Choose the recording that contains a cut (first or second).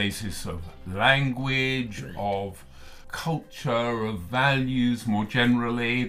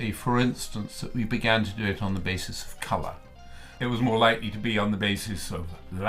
second